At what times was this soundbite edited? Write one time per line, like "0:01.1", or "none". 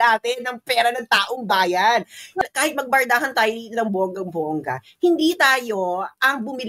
0:02.4

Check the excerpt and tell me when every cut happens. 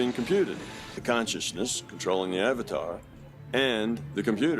0:01.0

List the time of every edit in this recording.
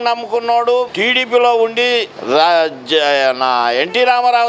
0:00.9
0:02.1

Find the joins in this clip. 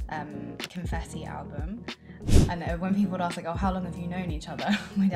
0:02.4

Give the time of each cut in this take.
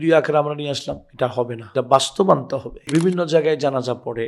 0:01.6
0:02.9

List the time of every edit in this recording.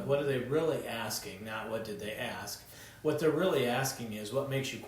0:02.8

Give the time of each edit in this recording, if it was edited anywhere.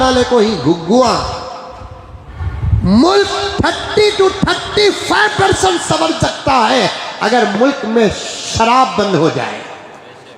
0:02.4

